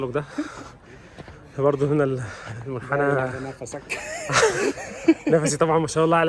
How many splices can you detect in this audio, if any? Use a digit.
0